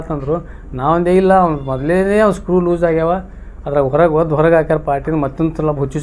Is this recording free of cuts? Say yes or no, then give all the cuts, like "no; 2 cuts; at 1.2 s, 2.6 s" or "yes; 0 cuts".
yes; 0 cuts